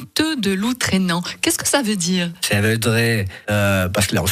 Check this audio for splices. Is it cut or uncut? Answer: uncut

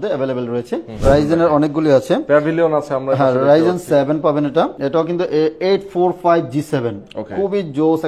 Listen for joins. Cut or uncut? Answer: cut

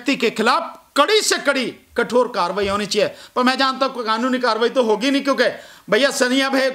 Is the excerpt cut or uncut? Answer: uncut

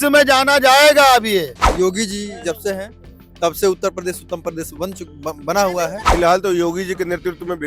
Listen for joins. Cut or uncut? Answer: cut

